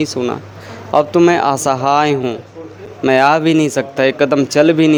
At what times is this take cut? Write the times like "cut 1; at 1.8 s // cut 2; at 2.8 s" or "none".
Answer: none